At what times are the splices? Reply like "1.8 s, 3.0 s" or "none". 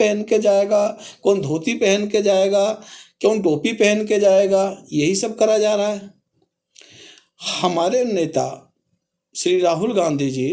none